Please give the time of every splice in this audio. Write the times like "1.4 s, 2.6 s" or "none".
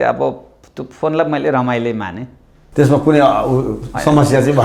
none